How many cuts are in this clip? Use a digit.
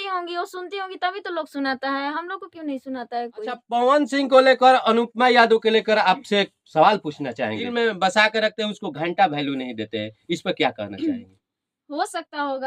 2